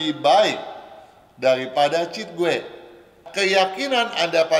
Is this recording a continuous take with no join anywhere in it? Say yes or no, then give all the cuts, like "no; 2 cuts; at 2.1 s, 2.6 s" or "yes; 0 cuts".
no; 1 cut; at 3.2 s